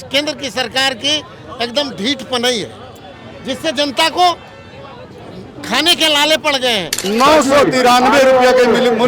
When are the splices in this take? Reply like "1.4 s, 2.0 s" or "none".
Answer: 7.0 s